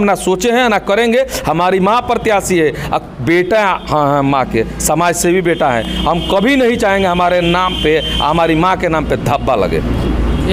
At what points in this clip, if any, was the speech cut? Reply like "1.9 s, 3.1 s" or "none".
none